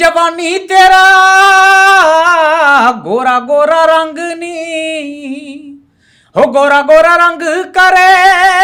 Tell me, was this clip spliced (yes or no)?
no